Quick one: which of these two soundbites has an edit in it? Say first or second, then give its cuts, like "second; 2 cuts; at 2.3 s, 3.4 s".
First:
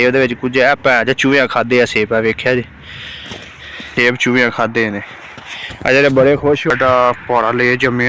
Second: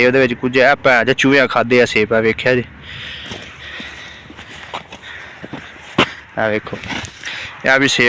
first; 2 cuts; at 3.9 s, 6.7 s